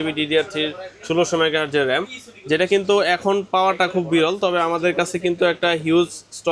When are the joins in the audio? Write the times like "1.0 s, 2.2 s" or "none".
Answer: none